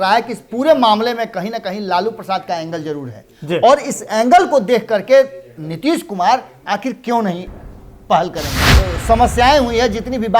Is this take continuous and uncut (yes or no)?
no